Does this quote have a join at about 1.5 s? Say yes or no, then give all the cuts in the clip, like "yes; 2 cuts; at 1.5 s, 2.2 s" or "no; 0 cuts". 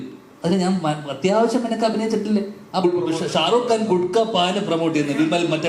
no; 1 cut; at 2.8 s